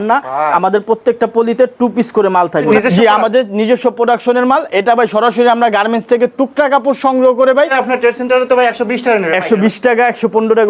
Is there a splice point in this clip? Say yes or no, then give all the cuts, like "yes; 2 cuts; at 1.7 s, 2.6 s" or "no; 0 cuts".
yes; 2 cuts; at 2.7 s, 7.7 s